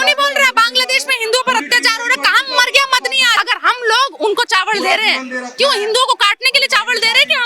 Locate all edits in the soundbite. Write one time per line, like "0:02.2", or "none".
0:03.4